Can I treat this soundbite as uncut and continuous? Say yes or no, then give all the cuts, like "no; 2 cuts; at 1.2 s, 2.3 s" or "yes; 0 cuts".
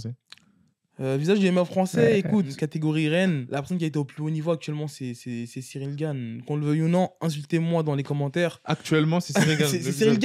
no; 2 cuts; at 2.5 s, 3.4 s